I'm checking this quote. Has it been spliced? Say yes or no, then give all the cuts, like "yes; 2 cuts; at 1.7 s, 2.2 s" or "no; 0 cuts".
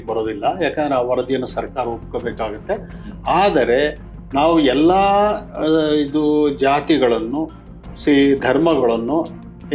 no; 0 cuts